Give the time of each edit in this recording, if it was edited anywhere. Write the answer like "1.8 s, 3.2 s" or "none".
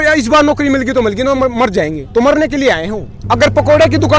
3.1 s